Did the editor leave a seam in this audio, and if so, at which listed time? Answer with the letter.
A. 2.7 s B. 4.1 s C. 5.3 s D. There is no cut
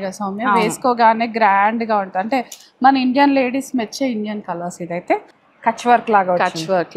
C